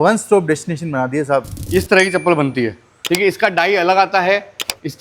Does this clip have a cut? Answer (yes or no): yes